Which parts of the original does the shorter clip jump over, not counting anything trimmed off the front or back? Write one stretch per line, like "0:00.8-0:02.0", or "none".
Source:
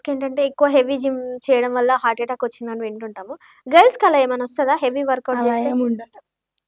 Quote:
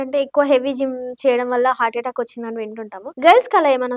0:03.2-0:03.5